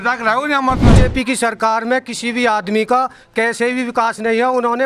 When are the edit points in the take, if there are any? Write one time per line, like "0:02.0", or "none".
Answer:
0:01.0